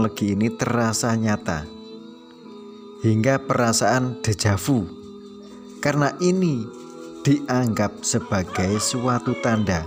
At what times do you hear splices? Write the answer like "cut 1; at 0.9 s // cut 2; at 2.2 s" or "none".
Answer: none